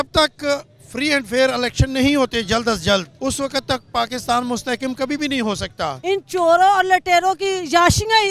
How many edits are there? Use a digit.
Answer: 2